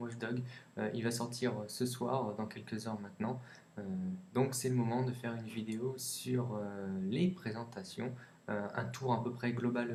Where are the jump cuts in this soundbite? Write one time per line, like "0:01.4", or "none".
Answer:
none